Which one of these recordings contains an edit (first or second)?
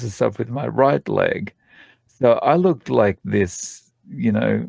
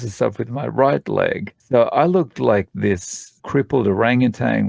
second